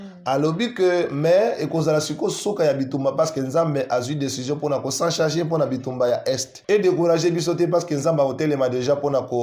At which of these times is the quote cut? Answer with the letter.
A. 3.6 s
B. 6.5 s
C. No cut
B